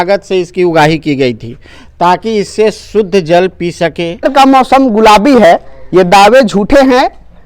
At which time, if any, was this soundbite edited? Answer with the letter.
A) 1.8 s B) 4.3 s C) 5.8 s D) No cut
B